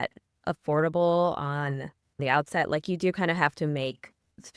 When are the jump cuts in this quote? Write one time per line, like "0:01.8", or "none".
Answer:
none